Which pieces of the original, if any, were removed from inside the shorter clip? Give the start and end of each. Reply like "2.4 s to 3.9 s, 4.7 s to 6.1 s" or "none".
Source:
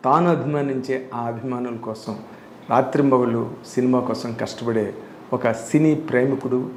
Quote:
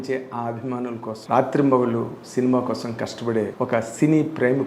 2.0 s to 2.6 s, 4.9 s to 5.2 s